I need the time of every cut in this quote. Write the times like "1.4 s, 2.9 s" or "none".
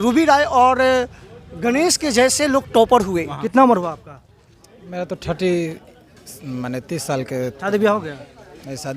3.3 s